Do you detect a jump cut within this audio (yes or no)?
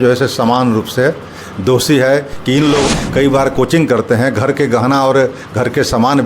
yes